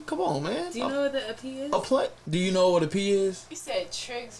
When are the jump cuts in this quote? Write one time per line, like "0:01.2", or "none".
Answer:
0:02.2
0:03.5